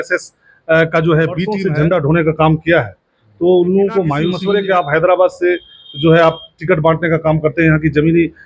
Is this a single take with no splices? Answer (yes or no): no